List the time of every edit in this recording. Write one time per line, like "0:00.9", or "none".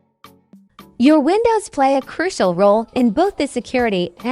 0:00.9